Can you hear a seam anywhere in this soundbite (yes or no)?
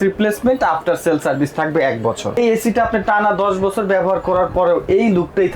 yes